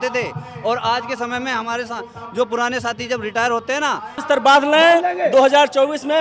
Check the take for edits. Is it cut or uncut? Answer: cut